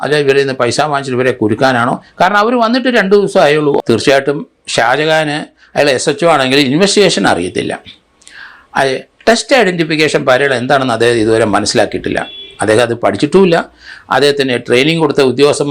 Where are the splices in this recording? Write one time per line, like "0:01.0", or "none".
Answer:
0:03.8